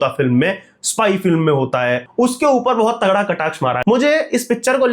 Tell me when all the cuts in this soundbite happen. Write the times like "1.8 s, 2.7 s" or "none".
2.1 s, 3.8 s